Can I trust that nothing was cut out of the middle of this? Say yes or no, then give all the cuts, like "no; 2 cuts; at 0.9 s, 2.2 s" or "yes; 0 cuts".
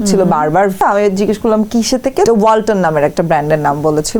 no; 2 cuts; at 0.8 s, 2.3 s